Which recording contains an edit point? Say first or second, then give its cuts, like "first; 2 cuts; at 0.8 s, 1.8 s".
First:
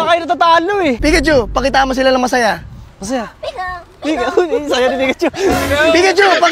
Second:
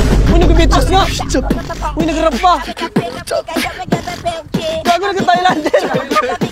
first; 1 cut; at 1.0 s